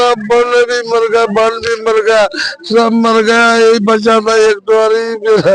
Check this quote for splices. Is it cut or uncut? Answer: uncut